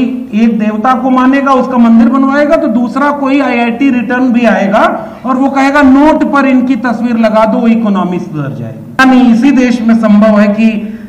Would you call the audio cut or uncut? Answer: cut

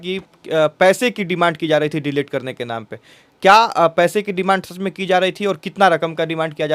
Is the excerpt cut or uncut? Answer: uncut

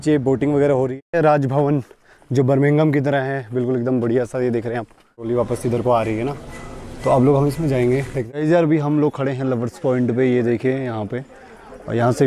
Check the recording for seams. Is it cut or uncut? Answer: cut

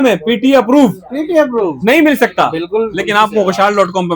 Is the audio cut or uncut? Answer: uncut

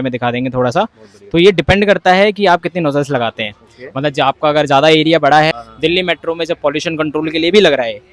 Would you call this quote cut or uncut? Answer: cut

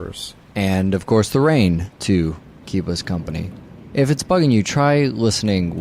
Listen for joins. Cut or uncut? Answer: cut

